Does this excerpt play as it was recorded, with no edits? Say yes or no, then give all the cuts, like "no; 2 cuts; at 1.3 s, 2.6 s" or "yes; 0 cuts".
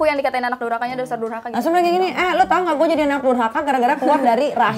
yes; 0 cuts